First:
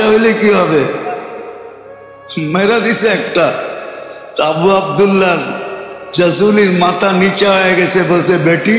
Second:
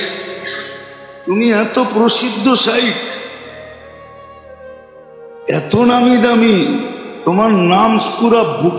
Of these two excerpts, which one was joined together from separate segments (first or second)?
second